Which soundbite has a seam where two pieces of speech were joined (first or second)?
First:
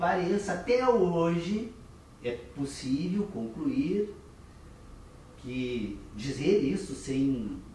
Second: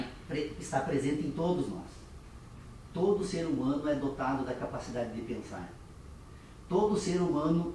second